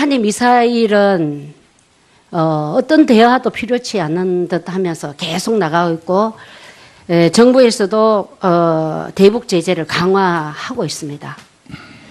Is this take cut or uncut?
uncut